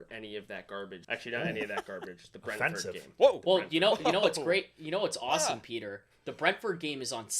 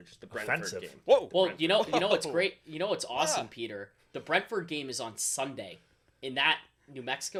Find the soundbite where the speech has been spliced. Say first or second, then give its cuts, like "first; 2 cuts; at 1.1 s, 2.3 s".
first; 1 cut; at 1.0 s